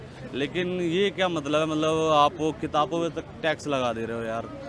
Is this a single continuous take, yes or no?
yes